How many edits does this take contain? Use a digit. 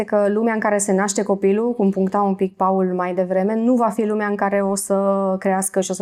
0